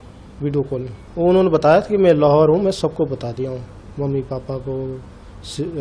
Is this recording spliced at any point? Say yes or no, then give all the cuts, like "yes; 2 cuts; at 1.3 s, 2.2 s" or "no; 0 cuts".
yes; 1 cut; at 1.0 s